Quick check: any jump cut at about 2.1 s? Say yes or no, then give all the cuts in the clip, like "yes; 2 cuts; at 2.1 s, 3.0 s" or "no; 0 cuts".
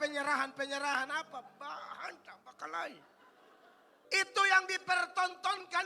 no; 1 cut; at 3.9 s